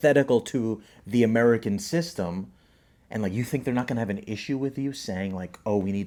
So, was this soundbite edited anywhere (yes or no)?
no